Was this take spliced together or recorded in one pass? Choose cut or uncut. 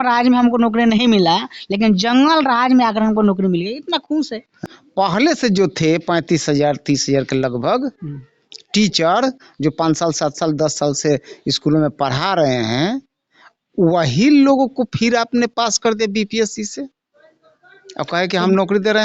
uncut